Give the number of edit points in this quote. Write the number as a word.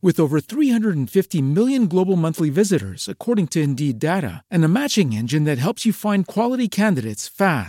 zero